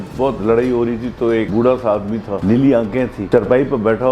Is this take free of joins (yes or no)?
no